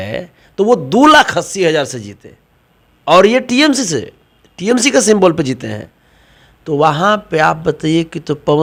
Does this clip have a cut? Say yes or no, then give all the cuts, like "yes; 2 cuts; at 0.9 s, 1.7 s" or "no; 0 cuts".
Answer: no; 0 cuts